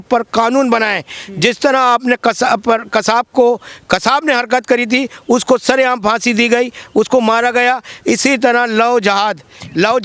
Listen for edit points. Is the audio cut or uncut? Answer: uncut